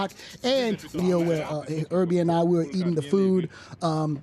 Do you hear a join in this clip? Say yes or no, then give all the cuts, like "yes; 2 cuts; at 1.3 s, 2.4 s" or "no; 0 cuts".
yes; 1 cut; at 1.0 s